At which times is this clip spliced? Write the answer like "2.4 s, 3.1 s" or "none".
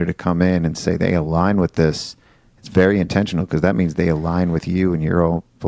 none